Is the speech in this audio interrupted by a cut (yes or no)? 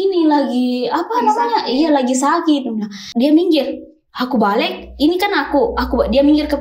yes